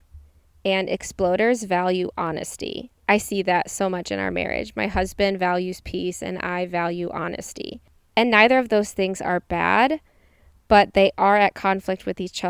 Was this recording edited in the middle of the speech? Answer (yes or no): yes